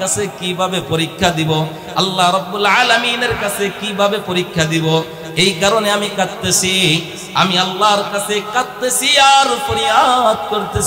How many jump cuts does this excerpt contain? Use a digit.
0